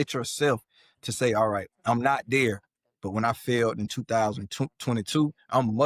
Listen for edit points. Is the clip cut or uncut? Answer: uncut